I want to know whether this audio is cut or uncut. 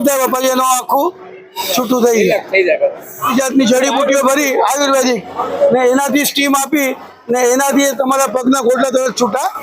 cut